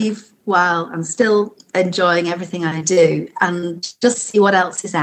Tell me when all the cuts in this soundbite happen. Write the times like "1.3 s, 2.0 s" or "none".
none